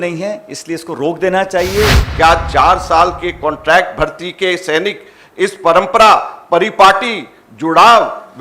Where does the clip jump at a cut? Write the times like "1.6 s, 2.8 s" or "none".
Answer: 2.0 s